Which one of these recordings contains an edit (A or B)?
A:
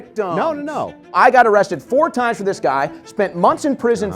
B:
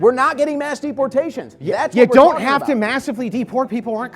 A